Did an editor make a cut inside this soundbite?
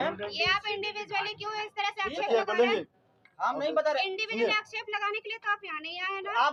no; 0 cuts

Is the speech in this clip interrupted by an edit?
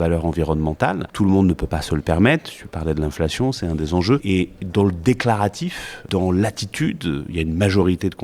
yes; 3 cuts; at 1.1 s, 4.2 s, 6.0 s

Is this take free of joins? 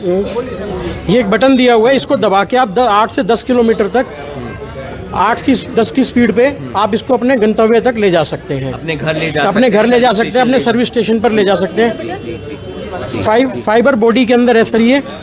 yes; 0 cuts

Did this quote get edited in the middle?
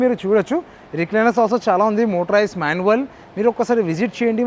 no; 0 cuts

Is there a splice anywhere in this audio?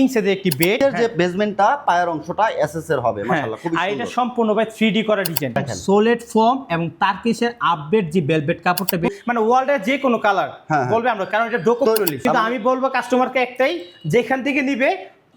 yes; 4 cuts; at 0.8 s, 5.5 s, 9.1 s, 12.2 s

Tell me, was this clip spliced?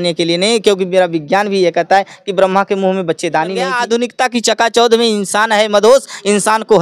yes; 1 cut; at 3.7 s

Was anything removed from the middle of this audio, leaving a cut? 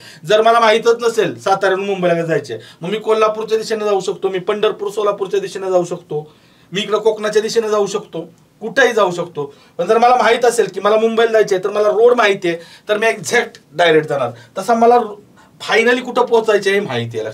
no; 0 cuts

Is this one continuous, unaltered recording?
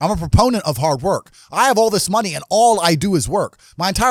yes; 0 cuts

